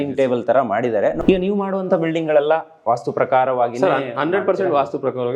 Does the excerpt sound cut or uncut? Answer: cut